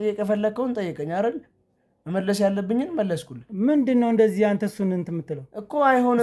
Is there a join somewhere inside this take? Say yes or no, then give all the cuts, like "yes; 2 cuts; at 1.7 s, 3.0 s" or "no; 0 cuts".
no; 0 cuts